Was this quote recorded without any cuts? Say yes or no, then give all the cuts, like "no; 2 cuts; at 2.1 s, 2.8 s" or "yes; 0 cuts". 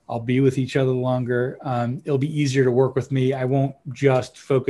yes; 0 cuts